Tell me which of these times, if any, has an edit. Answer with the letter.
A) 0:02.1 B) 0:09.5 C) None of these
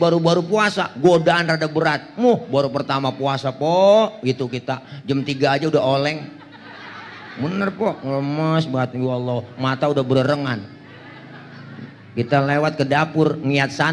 C